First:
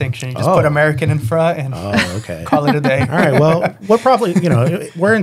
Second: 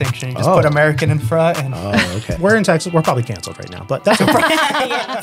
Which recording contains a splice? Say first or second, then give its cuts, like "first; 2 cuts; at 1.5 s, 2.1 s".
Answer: second; 1 cut; at 2.3 s